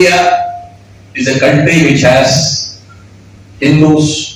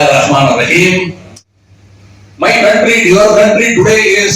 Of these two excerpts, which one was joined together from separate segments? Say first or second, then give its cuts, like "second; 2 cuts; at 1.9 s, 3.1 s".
second; 1 cut; at 1.3 s